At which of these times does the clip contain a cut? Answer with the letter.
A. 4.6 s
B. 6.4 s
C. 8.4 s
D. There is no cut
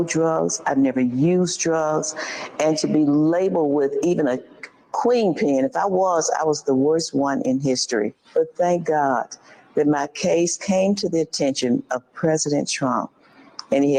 D